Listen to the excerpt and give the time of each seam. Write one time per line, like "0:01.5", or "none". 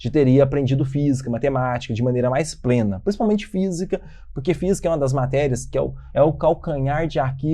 0:06.0